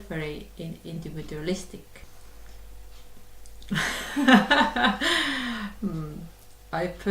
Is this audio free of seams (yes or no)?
no